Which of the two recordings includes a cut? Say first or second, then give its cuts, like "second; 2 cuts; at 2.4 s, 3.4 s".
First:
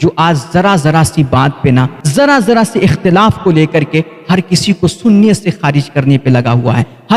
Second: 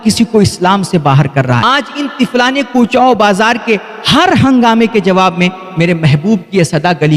second; 1 cut; at 1.6 s